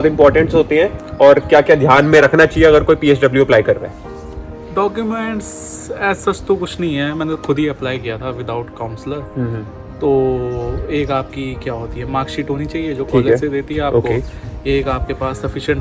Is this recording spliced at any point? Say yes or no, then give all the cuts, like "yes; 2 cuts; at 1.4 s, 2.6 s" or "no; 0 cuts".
no; 0 cuts